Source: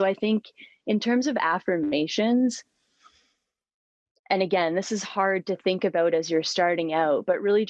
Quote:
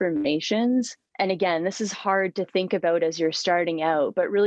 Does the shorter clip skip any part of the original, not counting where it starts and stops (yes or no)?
yes